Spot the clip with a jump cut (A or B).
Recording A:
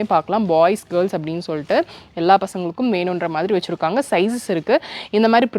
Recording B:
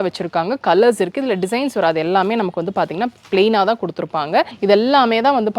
B